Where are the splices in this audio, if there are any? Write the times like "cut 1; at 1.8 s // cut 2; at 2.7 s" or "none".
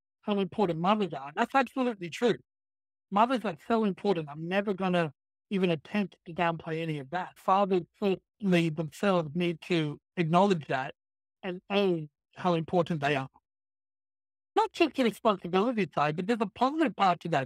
cut 1; at 7.4 s // cut 2; at 14.6 s